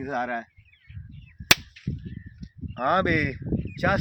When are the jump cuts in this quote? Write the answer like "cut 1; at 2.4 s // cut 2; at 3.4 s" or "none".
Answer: none